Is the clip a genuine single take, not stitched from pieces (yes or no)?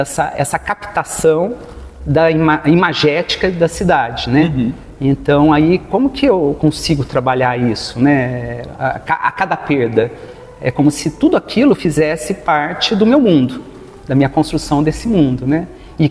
yes